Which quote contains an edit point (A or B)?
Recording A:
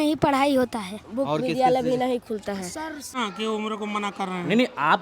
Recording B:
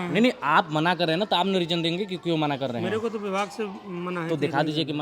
A